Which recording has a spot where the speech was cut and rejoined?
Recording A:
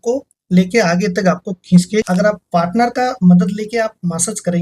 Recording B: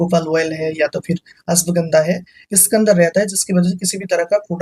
A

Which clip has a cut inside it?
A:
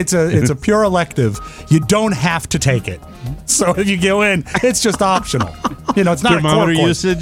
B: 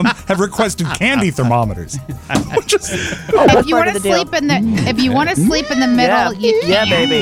B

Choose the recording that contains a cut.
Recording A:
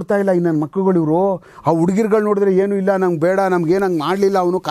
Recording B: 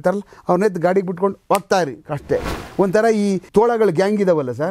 B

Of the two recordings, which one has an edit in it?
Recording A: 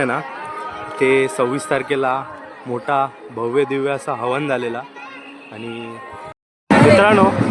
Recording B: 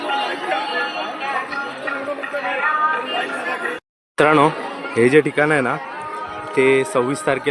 A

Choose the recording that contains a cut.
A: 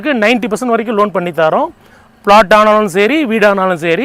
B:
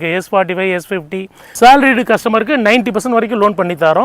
B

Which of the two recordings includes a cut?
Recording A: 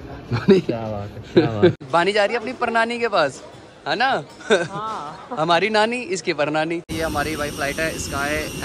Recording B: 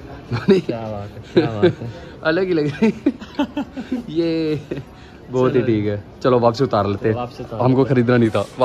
A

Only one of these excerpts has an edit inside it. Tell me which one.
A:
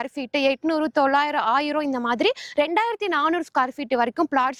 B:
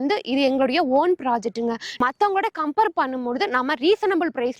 B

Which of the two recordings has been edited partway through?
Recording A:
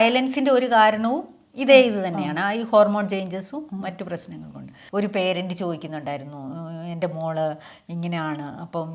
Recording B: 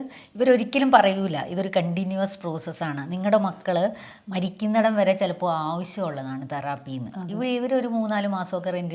A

